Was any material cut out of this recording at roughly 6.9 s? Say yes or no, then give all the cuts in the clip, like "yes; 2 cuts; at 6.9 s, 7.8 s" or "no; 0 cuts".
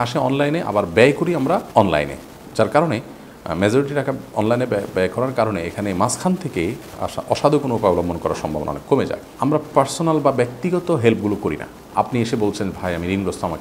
no; 3 cuts; at 1.7 s, 9.2 s, 11.8 s